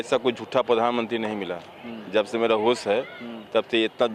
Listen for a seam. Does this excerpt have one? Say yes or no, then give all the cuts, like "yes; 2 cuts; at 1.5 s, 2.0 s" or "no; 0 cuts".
no; 0 cuts